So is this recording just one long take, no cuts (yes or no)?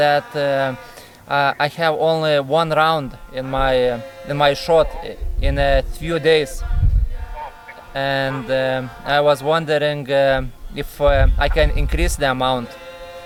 yes